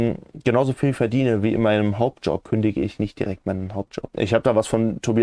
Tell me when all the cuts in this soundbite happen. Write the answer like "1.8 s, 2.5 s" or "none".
2.4 s, 4.0 s